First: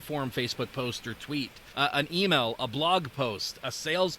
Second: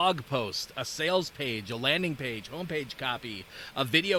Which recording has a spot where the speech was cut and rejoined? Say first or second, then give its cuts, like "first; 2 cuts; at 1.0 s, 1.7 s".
first; 1 cut; at 1.6 s